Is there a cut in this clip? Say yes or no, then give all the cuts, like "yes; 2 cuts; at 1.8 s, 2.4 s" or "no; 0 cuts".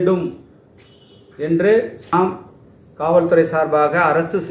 yes; 1 cut; at 2.1 s